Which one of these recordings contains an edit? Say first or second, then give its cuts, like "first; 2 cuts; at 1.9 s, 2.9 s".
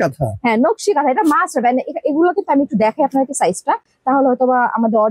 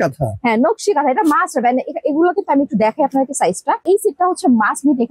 second; 1 cut; at 3.8 s